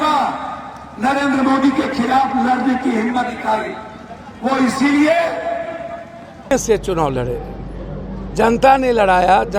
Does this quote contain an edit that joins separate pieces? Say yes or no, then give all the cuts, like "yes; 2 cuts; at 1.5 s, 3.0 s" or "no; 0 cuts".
yes; 1 cut; at 6.5 s